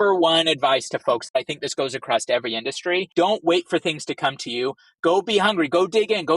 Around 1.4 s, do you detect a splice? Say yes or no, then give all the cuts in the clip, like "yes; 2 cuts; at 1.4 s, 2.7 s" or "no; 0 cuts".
yes; 2 cuts; at 1.4 s, 3.1 s